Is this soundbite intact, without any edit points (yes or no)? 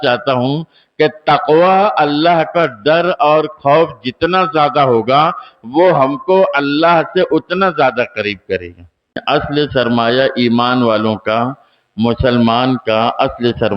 no